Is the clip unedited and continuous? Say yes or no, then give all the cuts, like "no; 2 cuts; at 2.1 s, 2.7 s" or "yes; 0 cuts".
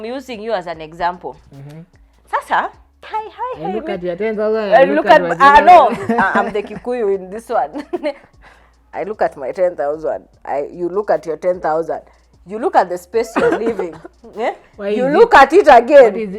no; 1 cut; at 3.1 s